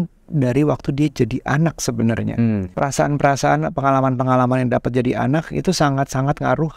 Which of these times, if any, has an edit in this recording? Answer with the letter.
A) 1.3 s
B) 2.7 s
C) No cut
B